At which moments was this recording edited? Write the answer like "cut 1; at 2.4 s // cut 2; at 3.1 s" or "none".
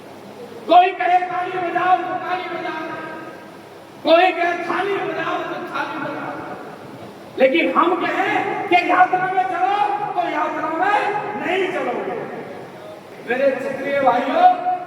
cut 1; at 13.1 s

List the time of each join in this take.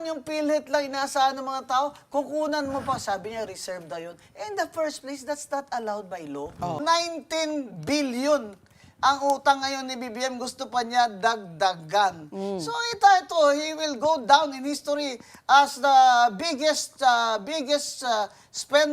cut 1; at 6.8 s

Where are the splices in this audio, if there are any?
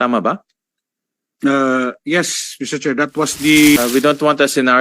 cut 1; at 3.8 s

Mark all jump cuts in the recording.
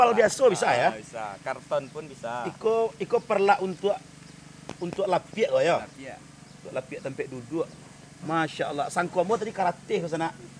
none

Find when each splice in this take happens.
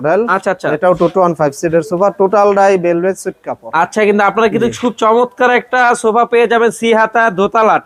none

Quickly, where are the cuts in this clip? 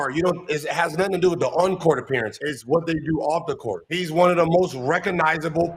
none

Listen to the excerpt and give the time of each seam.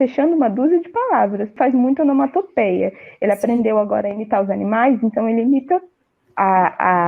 cut 1; at 1.5 s

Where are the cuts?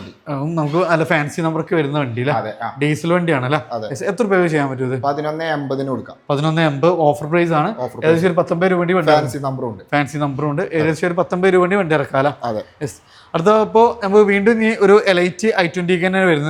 none

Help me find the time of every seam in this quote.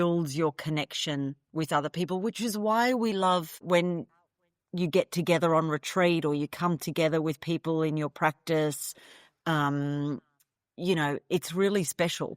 cut 1; at 3.6 s

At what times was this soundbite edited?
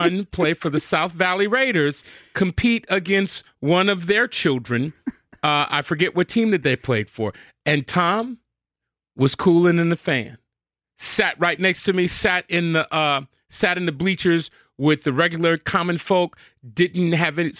none

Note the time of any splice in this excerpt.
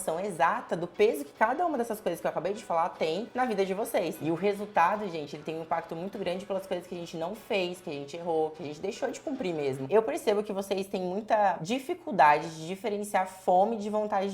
cut 1; at 4.2 s // cut 2; at 9.8 s

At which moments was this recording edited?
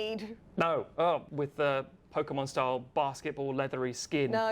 cut 1; at 1.3 s

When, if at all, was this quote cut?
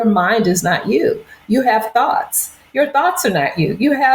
none

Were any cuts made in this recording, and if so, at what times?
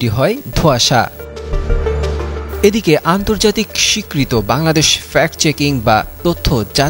none

